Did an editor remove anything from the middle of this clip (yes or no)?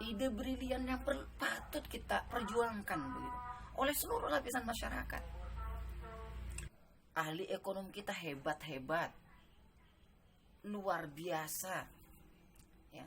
yes